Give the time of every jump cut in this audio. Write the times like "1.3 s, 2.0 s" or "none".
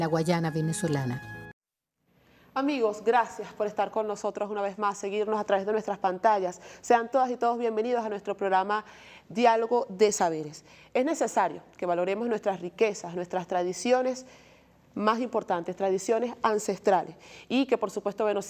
11.8 s